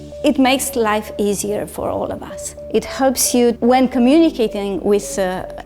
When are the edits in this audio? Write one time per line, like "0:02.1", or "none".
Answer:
0:02.6